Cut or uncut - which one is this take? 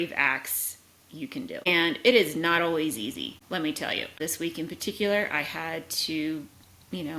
cut